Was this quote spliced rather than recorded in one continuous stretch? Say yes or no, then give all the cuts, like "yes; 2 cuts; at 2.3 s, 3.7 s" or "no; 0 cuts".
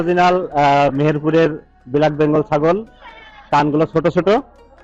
no; 0 cuts